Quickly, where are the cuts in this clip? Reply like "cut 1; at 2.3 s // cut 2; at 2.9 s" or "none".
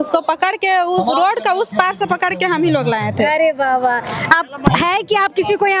none